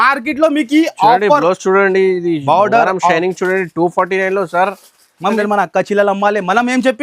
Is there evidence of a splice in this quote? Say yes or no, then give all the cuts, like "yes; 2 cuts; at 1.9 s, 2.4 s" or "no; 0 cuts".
yes; 1 cut; at 5.4 s